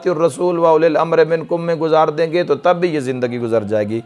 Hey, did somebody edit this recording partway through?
no; 0 cuts

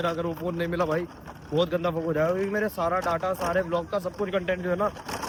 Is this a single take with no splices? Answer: yes; 0 cuts

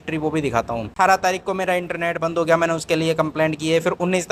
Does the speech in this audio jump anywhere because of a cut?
yes; 1 cut; at 0.9 s

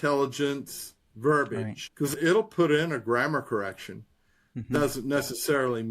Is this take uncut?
no; 2 cuts; at 1.8 s, 4.5 s

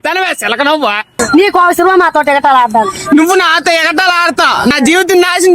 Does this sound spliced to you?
yes; 2 cuts; at 1.1 s, 4.7 s

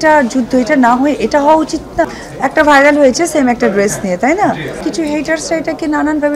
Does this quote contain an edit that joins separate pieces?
yes; 2 cuts; at 2.1 s, 4.8 s

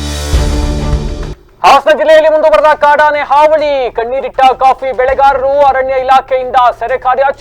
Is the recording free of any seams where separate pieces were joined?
no; 1 cut; at 1.4 s

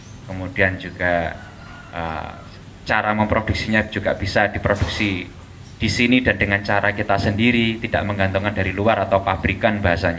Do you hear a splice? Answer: no; 0 cuts

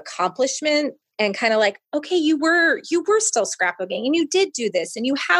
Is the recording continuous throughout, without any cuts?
yes; 0 cuts

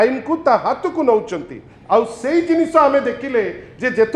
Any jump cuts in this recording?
no; 0 cuts

